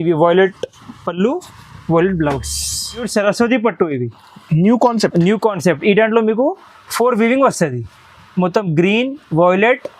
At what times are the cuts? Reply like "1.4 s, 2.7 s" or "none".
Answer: 3.0 s